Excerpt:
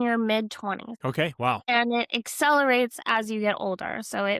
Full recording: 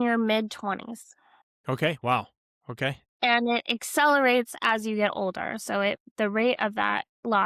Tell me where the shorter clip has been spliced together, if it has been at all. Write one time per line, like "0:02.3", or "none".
0:00.9
0:01.6

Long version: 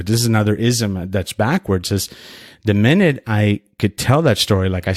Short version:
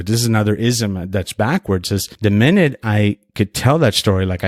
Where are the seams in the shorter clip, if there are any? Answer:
0:02.1

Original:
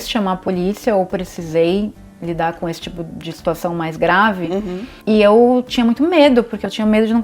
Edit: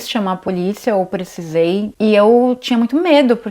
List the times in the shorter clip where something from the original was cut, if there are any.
0:01.9

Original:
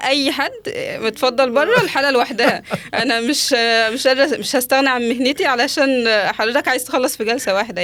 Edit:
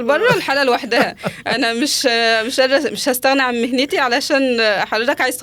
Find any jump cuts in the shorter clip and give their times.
none

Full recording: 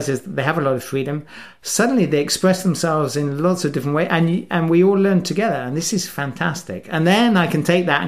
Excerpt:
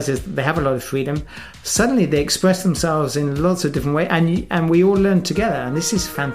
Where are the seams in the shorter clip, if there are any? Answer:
none

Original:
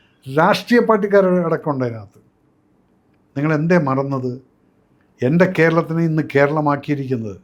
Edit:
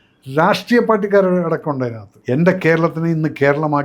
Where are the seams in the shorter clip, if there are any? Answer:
0:02.1

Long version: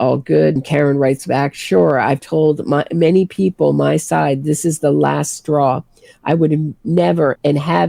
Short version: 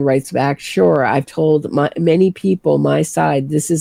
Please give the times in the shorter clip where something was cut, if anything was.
none

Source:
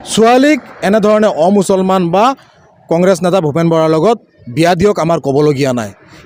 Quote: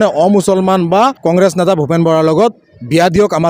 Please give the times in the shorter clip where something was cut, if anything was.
0:01.2

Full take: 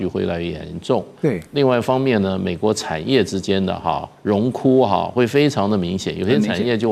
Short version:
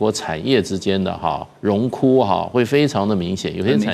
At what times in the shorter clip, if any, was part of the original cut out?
none

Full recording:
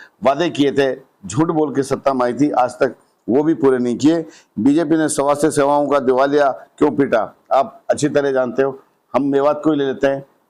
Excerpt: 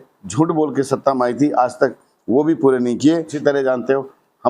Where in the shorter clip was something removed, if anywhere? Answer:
0:03.3

